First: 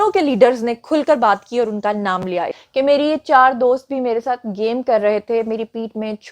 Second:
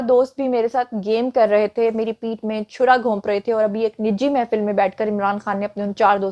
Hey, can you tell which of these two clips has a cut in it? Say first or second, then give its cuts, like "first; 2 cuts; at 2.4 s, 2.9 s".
first; 1 cut; at 2.5 s